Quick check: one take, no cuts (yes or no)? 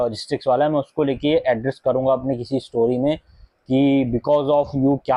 yes